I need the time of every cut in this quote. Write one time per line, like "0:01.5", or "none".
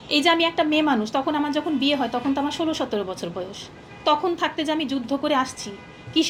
none